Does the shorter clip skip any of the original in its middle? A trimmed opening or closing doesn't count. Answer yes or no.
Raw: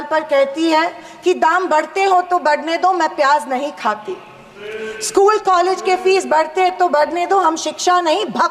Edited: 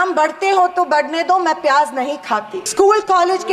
yes